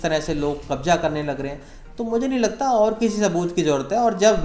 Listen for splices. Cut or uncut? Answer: uncut